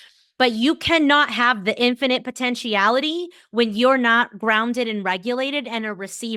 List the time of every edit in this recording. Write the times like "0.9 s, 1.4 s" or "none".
none